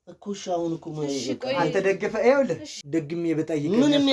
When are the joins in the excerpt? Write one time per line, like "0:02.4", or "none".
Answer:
0:02.8